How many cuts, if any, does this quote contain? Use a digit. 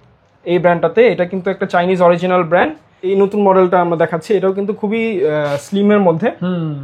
1